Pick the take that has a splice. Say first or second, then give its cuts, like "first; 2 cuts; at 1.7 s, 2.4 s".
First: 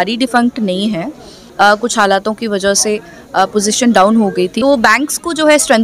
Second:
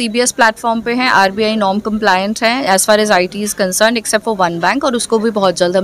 first; 2 cuts; at 1.4 s, 4.5 s